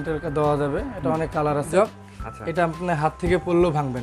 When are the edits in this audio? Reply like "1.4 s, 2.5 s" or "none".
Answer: 1.7 s